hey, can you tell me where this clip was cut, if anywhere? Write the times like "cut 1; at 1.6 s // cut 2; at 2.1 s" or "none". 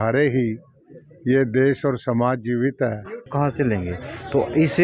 cut 1; at 3.3 s